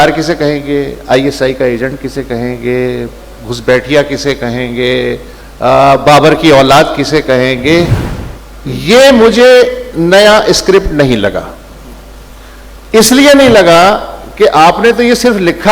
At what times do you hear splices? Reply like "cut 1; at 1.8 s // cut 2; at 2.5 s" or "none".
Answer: cut 1; at 8.0 s